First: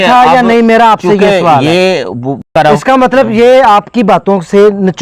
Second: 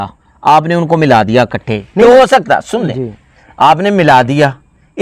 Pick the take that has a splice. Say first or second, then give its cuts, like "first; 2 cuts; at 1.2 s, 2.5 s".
first; 1 cut; at 2.5 s